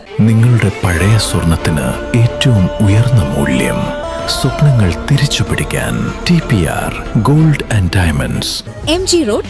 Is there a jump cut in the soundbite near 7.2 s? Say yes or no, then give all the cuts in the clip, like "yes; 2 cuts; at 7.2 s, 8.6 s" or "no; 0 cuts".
yes; 1 cut; at 7.2 s